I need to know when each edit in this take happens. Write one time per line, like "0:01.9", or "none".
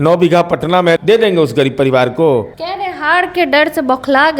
0:01.0
0:02.6